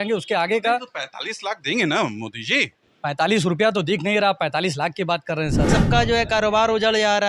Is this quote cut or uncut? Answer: cut